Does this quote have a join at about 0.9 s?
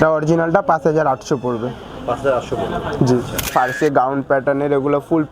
no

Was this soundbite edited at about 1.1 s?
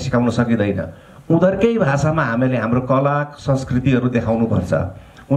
no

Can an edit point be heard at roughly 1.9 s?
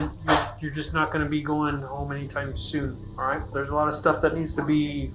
no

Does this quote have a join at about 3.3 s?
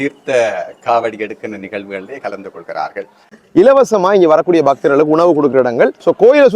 yes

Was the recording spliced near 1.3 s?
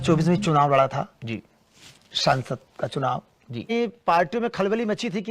no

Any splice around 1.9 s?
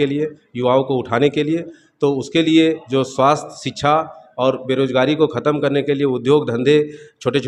no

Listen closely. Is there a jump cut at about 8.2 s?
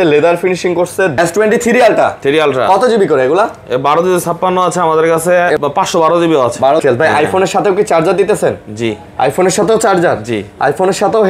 no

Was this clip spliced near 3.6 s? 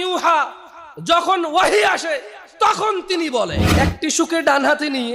yes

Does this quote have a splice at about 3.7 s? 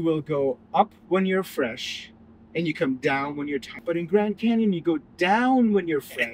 yes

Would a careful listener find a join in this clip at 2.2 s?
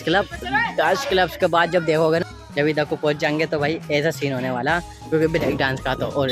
yes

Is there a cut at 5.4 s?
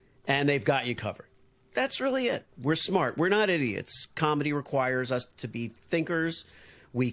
yes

